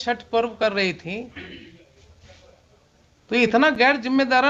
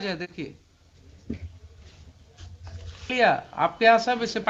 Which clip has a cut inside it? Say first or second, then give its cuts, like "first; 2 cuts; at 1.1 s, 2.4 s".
second; 1 cut; at 3.1 s